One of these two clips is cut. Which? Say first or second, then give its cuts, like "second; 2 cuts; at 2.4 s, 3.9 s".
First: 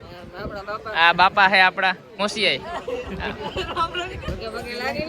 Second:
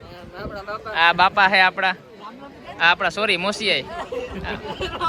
first; 1 cut; at 2.2 s